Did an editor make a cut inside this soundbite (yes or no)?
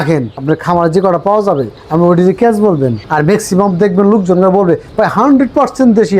yes